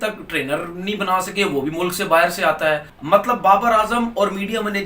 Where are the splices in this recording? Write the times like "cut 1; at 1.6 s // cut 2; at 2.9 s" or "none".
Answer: cut 1; at 2.9 s